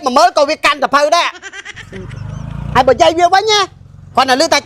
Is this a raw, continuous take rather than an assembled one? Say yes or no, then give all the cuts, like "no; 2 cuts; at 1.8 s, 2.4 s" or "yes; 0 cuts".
no; 1 cut; at 1.6 s